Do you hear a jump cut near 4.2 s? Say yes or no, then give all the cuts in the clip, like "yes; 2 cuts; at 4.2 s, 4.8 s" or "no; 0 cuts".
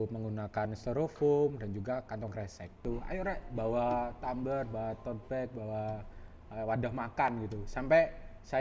no; 1 cut; at 2.8 s